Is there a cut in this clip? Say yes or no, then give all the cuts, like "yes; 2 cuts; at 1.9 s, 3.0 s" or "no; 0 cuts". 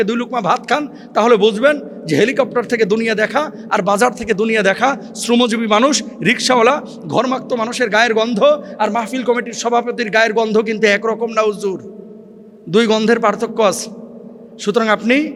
no; 0 cuts